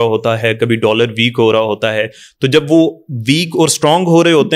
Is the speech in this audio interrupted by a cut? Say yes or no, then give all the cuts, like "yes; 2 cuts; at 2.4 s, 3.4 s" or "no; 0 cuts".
no; 0 cuts